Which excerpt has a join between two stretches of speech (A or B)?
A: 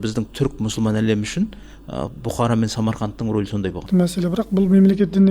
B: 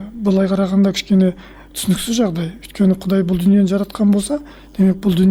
A